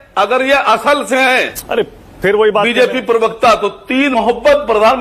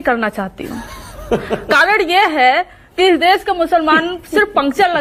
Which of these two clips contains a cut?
first; 2 cuts; at 1.6 s, 4.1 s

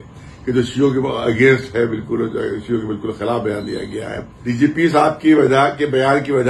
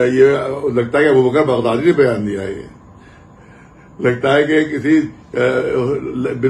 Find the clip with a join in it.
first; 1 cut; at 4.3 s

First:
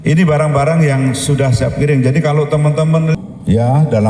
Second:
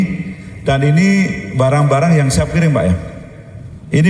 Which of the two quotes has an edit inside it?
first; 1 cut; at 3.2 s

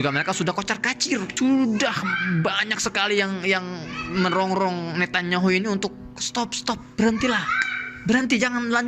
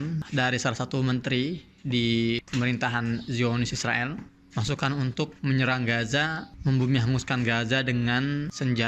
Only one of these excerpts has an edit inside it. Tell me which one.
first; 1 cut; at 1.3 s

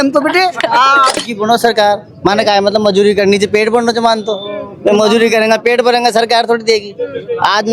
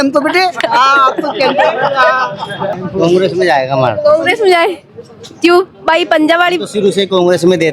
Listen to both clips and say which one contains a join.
first; 1 cut; at 1.2 s

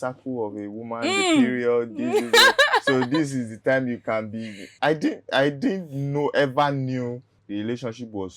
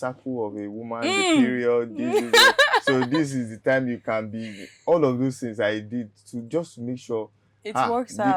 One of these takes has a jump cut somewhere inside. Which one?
first; 2 cuts; at 4.7 s, 7.3 s

